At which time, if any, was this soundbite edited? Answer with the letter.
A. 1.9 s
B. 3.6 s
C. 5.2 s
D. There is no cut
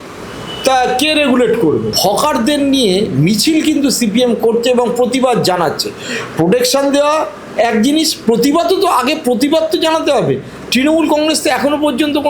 A